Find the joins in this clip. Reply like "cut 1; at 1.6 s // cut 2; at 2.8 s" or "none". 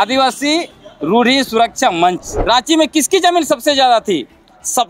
cut 1; at 2.3 s